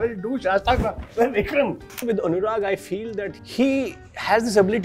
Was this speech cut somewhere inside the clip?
yes; 2 cuts; at 2.0 s, 3.3 s

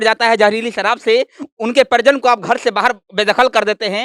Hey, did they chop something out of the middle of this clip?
no; 0 cuts

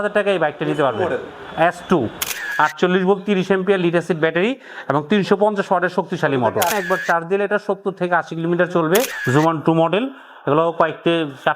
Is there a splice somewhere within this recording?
yes; 3 cuts; at 2.4 s, 6.7 s, 9.2 s

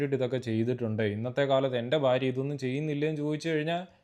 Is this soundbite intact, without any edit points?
yes; 0 cuts

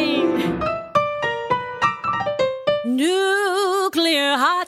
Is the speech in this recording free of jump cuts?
yes; 0 cuts

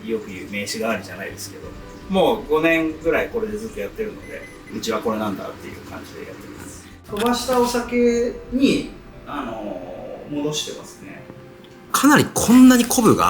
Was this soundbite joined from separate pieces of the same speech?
no; 0 cuts

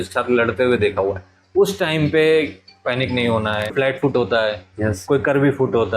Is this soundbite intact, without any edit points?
no; 1 cut; at 3.7 s

